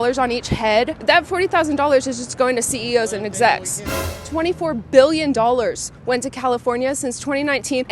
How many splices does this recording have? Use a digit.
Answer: 2